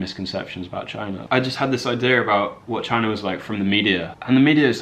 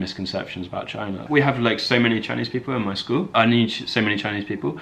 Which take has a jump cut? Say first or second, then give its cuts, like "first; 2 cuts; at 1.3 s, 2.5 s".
first; 1 cut; at 1.2 s